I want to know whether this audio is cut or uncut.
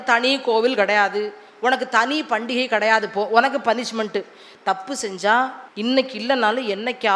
cut